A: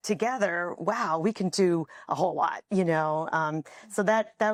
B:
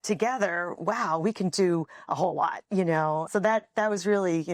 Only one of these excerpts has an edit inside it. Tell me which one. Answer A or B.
B